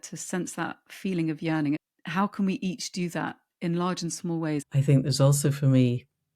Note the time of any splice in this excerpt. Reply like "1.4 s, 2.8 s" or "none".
1.9 s, 4.6 s